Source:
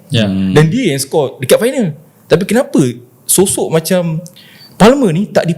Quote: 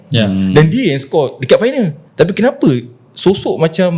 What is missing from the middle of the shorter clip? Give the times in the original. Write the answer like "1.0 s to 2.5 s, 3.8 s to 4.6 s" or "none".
2.0 s to 2.1 s